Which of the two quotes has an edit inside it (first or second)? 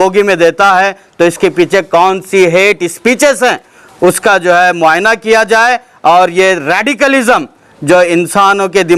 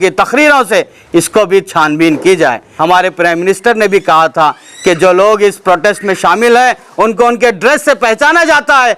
second